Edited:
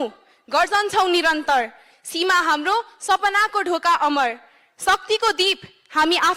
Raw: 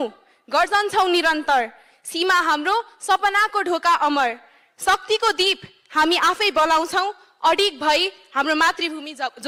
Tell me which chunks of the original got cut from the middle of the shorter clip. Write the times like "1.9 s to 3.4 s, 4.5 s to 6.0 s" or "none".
none